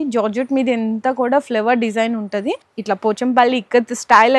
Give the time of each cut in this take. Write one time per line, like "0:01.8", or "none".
0:02.5